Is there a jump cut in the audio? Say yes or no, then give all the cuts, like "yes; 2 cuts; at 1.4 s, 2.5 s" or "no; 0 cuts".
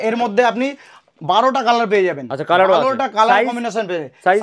no; 0 cuts